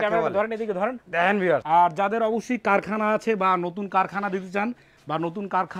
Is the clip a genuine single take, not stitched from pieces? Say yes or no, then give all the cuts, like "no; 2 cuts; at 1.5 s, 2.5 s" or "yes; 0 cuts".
yes; 0 cuts